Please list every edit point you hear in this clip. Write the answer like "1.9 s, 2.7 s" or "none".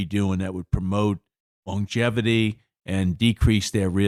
none